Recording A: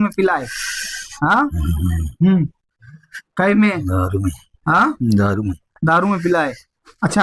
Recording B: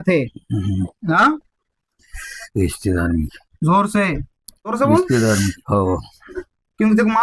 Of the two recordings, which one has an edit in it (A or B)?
B